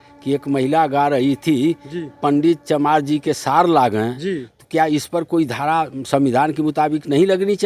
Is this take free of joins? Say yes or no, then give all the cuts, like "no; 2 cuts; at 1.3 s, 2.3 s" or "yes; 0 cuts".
yes; 0 cuts